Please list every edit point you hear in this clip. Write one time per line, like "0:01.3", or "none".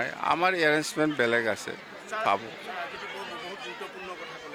none